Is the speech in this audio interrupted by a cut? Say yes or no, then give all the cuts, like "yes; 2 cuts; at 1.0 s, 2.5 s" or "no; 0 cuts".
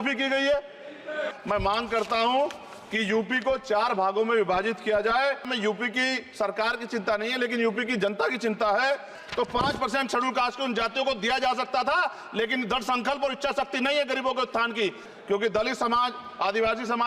yes; 4 cuts; at 1.3 s, 5.5 s, 9.2 s, 15.0 s